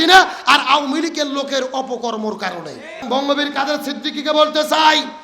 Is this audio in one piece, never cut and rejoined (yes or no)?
no